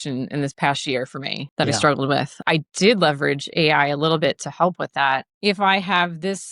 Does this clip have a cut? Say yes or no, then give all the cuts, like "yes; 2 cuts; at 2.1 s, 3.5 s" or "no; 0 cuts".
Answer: yes; 3 cuts; at 1.4 s, 2.4 s, 5.3 s